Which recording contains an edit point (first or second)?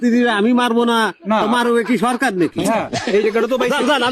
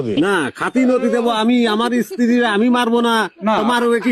first